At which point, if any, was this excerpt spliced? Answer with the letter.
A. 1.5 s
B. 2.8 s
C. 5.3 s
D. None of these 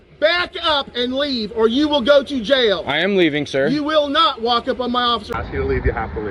C